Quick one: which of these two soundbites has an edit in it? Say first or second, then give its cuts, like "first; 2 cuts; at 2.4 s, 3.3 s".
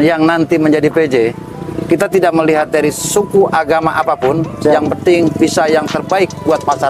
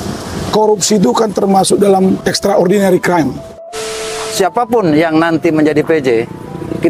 second; 1 cut; at 3.7 s